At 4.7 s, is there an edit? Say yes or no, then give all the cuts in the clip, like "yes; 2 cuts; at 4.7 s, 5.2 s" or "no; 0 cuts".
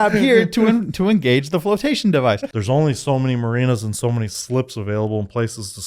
no; 1 cut; at 2.5 s